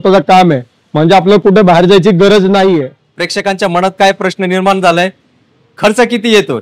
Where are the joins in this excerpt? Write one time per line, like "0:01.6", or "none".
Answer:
0:03.1